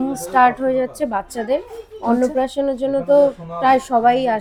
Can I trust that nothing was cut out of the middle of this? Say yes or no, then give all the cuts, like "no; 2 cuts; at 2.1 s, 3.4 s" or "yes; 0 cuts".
yes; 0 cuts